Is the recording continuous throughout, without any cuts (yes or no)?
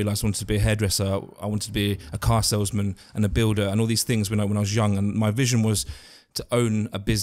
yes